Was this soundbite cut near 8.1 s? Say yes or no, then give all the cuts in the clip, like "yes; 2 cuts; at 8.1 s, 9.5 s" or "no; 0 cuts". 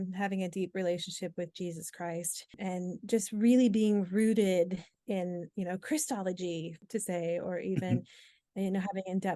no; 3 cuts; at 2.6 s, 4.9 s, 6.8 s